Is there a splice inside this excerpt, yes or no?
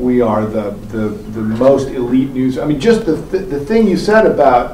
no